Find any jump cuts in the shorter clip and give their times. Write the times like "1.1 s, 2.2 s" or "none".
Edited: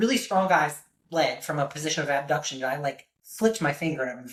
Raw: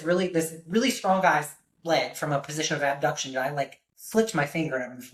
none